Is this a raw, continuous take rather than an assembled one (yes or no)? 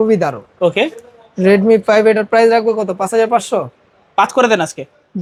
yes